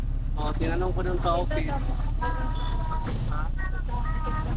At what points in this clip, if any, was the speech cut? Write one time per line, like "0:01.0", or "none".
none